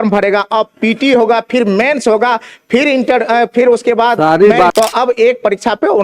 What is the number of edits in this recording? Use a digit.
1